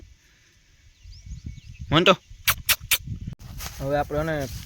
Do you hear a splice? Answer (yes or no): yes